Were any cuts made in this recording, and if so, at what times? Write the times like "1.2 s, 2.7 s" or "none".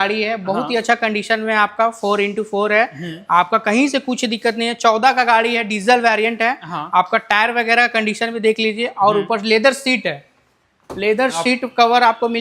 none